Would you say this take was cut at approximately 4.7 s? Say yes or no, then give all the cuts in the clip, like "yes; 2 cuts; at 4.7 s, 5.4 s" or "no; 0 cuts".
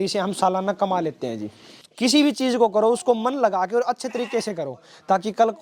no; 1 cut; at 1.8 s